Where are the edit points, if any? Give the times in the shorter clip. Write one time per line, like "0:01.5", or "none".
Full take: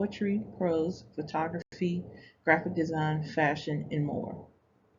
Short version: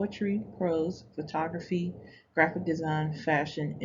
0:01.6